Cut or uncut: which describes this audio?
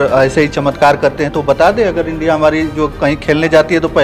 uncut